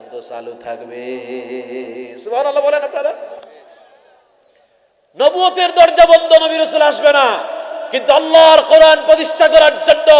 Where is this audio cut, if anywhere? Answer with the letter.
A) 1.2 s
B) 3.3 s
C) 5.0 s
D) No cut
D